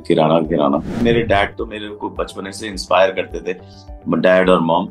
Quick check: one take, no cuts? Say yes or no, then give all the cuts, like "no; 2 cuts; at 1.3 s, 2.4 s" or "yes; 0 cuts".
no; 1 cut; at 1.0 s